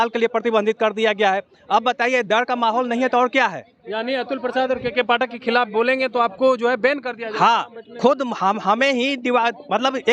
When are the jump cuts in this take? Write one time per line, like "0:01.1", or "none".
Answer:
none